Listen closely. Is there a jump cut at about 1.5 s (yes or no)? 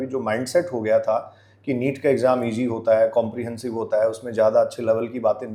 no